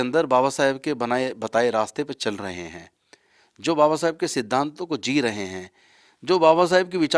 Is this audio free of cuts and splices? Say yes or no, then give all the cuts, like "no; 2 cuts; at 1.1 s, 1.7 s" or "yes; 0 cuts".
yes; 0 cuts